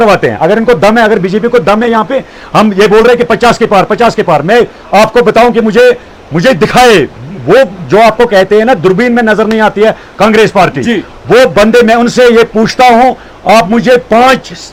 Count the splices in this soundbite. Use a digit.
0